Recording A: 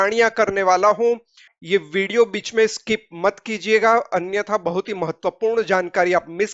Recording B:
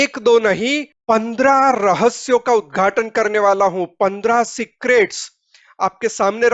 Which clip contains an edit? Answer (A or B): B